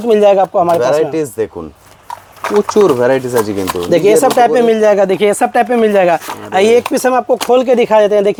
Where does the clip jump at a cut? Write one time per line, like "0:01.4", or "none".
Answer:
none